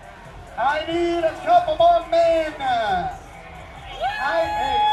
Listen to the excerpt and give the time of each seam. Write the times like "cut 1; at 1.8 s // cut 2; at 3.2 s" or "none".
none